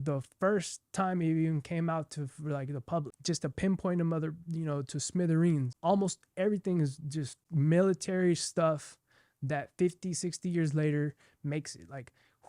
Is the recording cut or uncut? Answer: cut